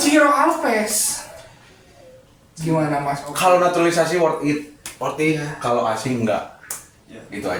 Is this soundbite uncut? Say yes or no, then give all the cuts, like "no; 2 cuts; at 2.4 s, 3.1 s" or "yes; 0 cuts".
yes; 0 cuts